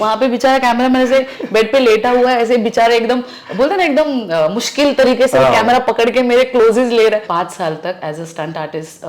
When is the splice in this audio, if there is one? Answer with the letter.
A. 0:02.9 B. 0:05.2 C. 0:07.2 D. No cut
C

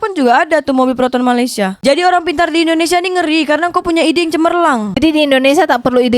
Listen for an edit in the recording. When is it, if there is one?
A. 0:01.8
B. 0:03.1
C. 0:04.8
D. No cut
A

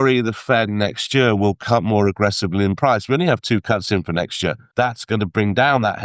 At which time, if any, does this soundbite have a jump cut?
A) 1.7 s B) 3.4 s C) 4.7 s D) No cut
C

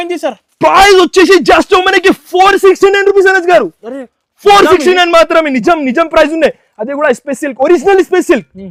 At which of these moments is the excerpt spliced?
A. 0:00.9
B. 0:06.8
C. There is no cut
C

